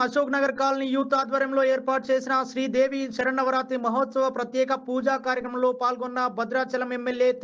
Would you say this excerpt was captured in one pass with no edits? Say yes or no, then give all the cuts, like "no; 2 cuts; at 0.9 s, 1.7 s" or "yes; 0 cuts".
yes; 0 cuts